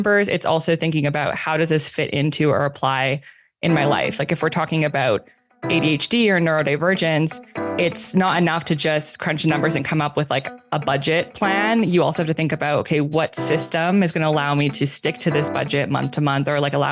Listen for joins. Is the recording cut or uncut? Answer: uncut